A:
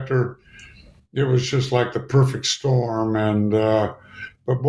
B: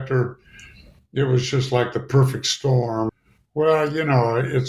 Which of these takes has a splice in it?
B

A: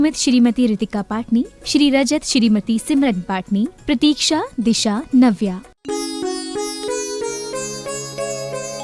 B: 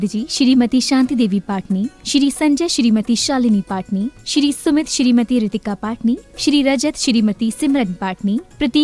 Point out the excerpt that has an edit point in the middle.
A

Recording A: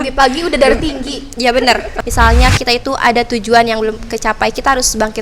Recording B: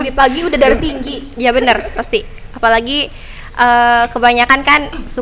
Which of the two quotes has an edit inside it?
A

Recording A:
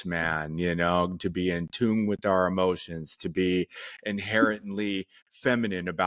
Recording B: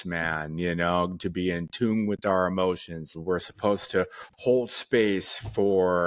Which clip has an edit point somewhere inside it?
B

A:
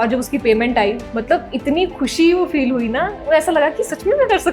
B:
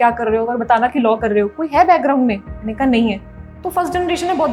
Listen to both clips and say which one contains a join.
A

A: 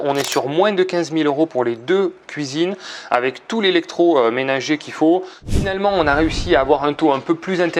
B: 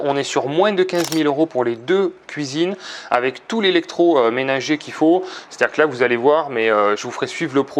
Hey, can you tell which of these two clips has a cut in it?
A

